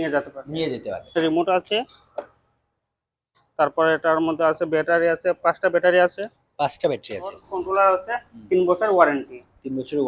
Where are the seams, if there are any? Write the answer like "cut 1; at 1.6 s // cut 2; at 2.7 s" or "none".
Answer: cut 1; at 1.2 s // cut 2; at 7.5 s